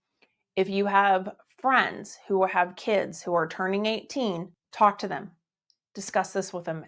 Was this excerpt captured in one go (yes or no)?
no